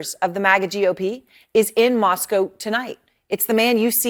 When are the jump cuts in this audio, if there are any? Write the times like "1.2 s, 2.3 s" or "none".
none

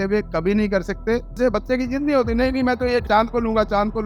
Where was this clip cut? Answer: 1.4 s, 3.1 s

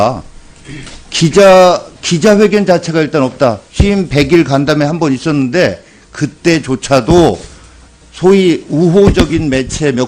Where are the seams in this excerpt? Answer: 7.3 s

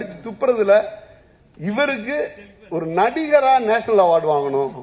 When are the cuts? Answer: none

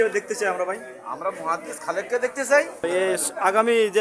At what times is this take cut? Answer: 2.8 s

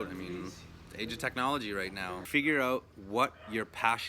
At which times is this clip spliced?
2.2 s

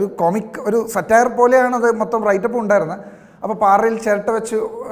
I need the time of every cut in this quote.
none

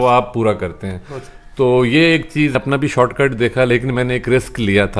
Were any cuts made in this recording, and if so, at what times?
2.5 s

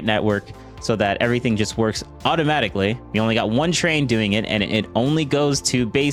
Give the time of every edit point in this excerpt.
none

